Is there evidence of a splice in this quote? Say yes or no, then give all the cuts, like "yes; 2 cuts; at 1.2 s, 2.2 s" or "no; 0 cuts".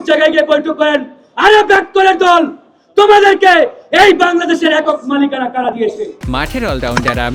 no; 0 cuts